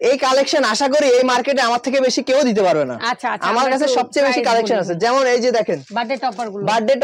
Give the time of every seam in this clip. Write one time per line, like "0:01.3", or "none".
none

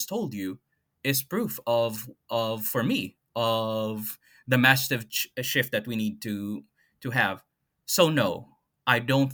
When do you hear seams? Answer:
none

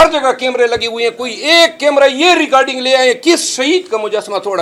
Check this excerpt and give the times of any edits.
none

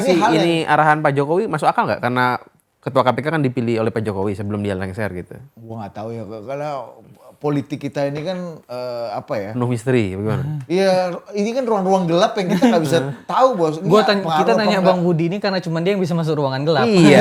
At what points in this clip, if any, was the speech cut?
none

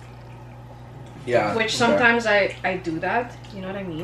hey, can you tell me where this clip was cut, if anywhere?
none

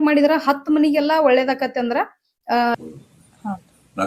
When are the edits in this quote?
0:02.7

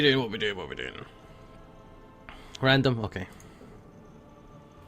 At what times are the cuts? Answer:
0:03.2

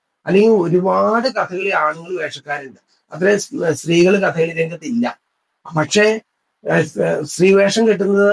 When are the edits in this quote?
none

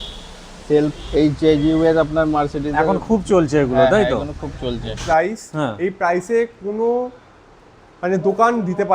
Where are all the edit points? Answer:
0:01.0
0:05.0

